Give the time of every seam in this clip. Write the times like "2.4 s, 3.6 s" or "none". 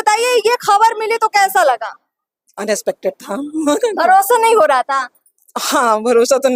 none